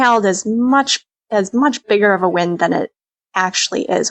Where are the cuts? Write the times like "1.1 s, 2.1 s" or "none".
none